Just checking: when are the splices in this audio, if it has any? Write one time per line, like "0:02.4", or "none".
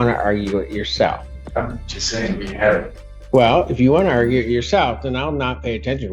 0:01.3